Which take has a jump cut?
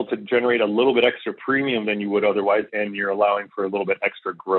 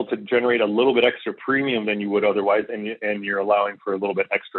first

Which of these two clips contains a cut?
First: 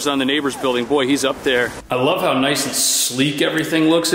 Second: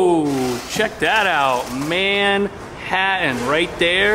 first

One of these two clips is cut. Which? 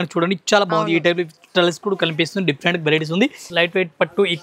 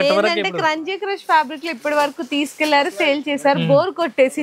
first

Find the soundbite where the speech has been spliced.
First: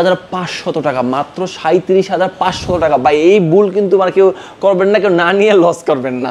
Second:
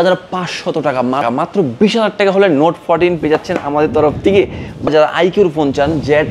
second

